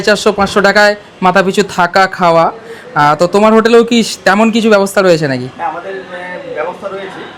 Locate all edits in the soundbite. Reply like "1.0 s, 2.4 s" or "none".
none